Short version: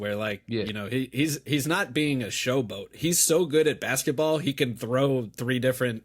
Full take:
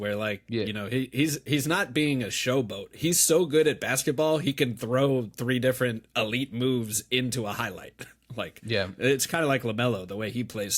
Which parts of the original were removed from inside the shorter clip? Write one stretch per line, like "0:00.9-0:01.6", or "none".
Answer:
none